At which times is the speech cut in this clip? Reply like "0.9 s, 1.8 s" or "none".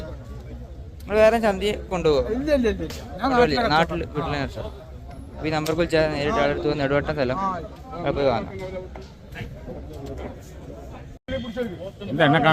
none